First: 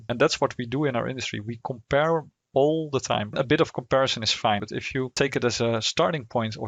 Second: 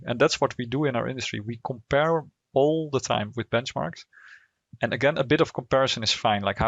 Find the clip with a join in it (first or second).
first